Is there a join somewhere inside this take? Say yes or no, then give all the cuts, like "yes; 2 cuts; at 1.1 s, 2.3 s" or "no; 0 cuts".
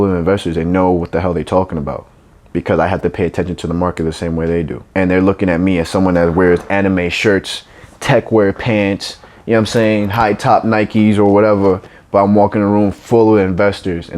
yes; 1 cut; at 4.8 s